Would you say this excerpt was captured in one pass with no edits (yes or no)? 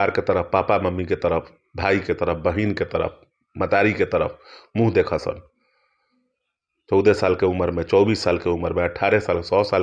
yes